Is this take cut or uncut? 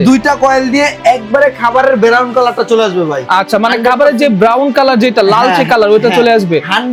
uncut